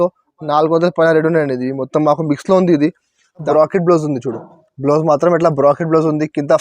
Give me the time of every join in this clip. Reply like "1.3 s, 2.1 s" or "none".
3.5 s